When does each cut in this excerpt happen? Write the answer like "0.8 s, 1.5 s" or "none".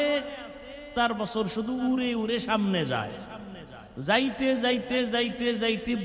1.0 s